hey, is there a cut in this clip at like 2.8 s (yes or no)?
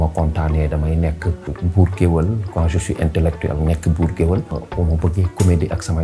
no